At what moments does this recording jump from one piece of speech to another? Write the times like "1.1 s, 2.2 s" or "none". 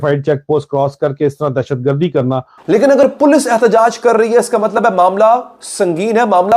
2.5 s